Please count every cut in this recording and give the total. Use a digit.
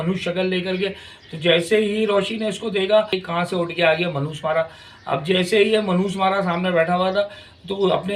1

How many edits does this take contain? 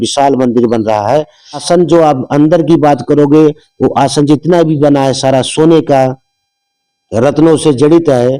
1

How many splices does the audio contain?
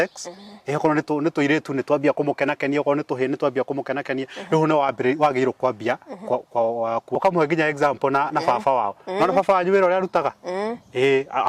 1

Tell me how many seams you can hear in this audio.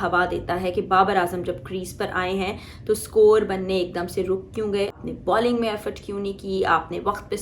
1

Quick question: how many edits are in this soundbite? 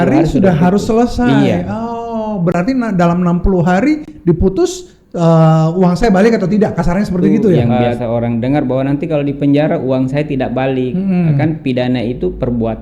1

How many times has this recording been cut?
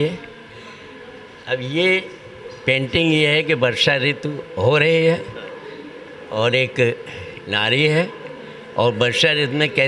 0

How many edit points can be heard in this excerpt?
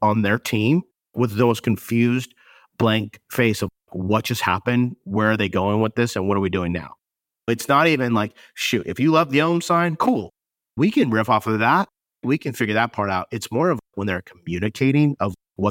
0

